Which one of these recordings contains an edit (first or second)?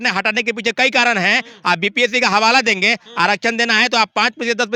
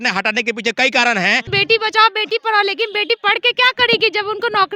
second